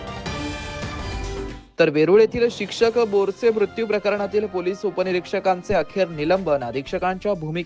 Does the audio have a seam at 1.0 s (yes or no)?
yes